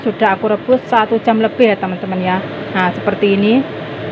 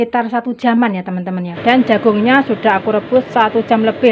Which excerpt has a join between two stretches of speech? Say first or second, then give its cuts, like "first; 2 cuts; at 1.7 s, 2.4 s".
second; 1 cut; at 1.5 s